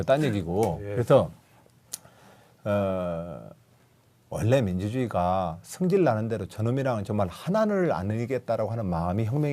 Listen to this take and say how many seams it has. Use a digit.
1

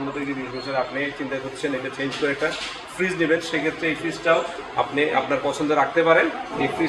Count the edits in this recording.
0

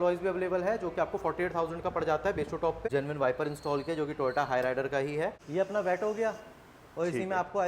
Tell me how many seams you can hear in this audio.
2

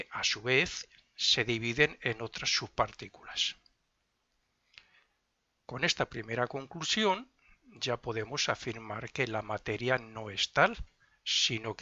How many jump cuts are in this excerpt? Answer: 1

